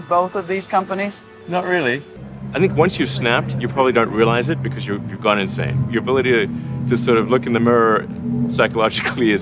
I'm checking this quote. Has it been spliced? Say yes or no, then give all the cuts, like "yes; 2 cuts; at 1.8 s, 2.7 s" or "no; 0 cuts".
yes; 2 cuts; at 1.3 s, 2.2 s